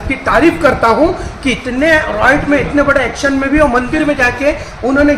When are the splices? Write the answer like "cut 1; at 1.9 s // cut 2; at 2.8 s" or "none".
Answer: none